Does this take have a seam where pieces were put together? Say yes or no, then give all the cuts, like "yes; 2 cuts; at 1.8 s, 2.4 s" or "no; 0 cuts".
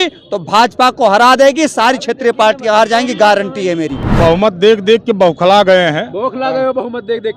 yes; 1 cut; at 4.1 s